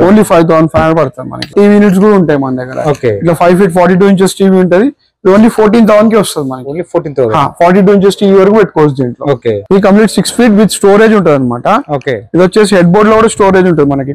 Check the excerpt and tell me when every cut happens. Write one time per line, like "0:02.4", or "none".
0:01.5
0:09.6

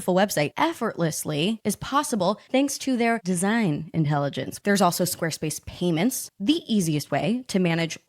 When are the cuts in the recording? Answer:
0:04.5

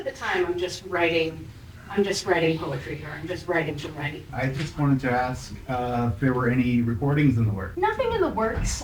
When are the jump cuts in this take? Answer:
0:04.3
0:07.6

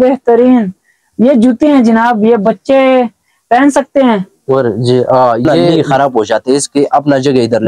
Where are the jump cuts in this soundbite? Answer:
0:05.6

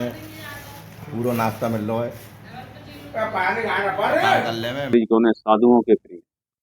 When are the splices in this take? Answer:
0:04.9

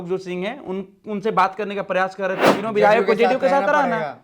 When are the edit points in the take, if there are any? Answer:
0:02.5

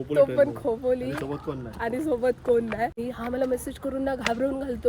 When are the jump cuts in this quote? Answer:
0:03.0

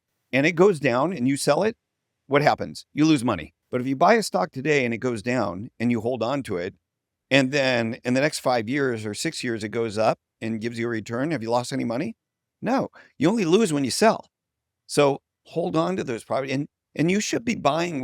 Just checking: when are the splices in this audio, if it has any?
0:03.5

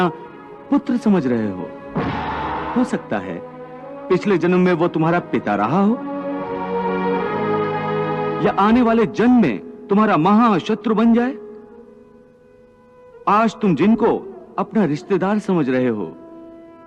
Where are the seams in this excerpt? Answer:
0:02.7

